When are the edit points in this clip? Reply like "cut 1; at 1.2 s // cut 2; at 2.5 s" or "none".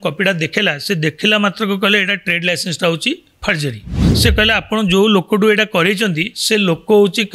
cut 1; at 4.0 s